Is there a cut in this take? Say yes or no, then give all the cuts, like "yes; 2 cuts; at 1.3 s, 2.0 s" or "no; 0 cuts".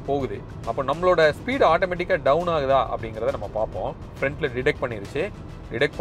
yes; 1 cut; at 4.0 s